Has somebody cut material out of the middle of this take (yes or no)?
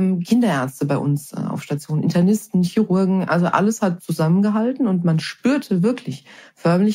no